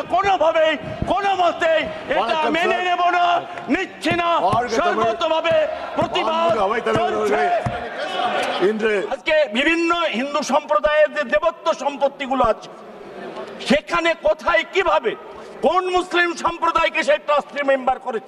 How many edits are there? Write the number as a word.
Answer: one